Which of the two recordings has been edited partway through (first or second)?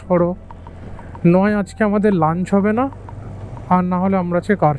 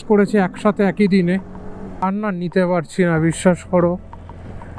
second